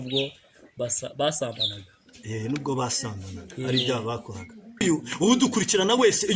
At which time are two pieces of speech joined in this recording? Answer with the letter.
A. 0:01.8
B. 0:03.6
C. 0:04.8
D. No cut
C